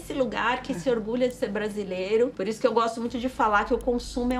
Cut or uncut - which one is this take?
cut